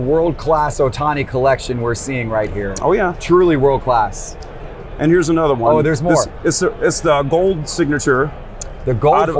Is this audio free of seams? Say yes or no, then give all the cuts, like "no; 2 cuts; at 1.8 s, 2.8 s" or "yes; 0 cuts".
yes; 0 cuts